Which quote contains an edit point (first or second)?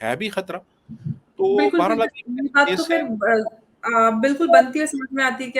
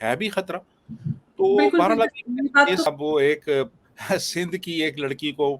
second